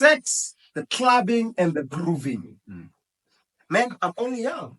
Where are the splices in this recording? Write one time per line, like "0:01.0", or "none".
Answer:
none